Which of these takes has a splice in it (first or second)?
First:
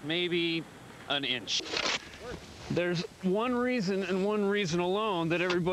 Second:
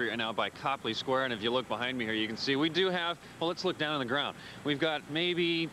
first